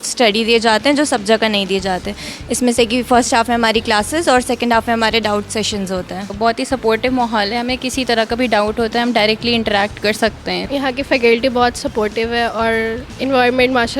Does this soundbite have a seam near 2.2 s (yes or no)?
no